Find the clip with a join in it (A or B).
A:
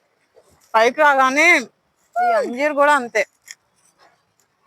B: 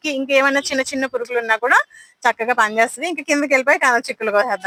A